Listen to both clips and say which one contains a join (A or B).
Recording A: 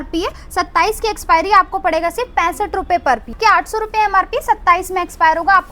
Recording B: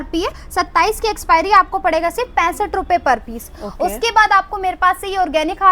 A